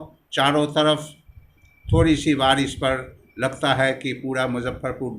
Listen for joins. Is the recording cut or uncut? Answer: uncut